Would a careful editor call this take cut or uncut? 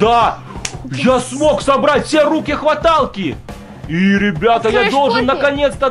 uncut